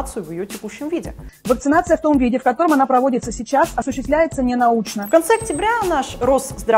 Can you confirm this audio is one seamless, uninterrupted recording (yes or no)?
no